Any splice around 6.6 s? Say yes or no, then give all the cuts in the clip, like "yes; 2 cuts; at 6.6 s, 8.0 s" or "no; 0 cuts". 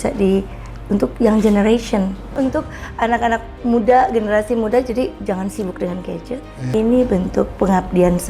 yes; 2 cuts; at 2.3 s, 6.6 s